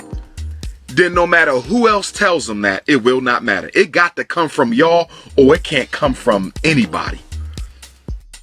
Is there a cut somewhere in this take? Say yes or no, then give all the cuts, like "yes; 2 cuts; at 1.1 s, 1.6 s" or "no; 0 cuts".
yes; 1 cut; at 7.2 s